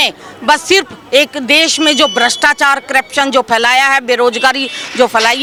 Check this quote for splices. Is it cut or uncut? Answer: uncut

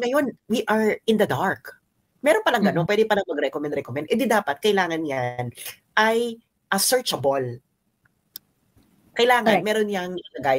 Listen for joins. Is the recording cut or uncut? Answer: uncut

